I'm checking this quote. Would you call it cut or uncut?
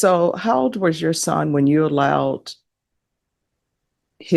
uncut